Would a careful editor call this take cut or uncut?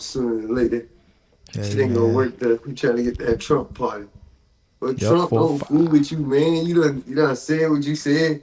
uncut